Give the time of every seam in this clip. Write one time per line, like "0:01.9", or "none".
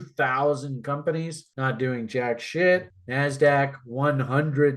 0:01.4
0:03.0

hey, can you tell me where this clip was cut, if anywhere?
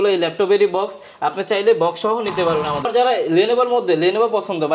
0:02.9

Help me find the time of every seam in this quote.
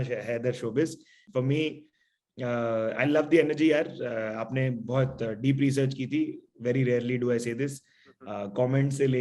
0:01.2

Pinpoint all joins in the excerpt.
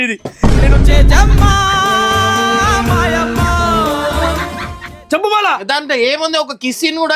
0:04.8

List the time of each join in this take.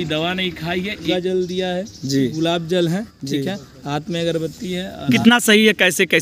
0:01.1
0:05.2

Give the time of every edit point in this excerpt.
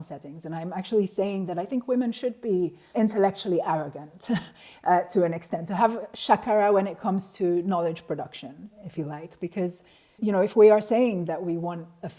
0:02.9
0:10.2

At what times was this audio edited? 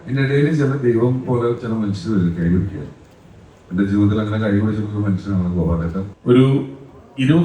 0:06.1

